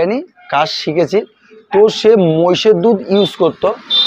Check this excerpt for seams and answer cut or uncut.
uncut